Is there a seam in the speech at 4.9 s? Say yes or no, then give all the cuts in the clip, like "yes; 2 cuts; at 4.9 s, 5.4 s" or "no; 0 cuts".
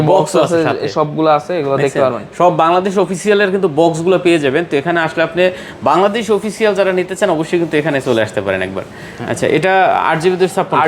no; 0 cuts